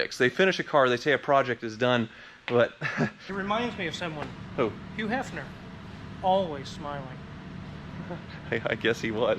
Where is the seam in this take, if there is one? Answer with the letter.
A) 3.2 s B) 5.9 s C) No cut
A